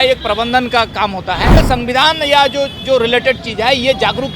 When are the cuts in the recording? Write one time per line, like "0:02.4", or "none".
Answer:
0:01.6